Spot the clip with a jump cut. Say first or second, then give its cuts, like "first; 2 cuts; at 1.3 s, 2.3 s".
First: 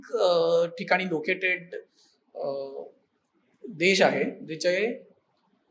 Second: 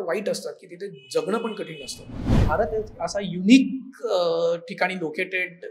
second; 1 cut; at 2.4 s